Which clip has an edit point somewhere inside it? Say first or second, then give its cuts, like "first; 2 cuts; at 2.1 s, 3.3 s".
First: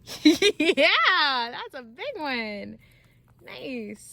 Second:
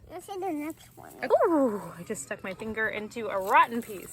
second; 1 cut; at 1.3 s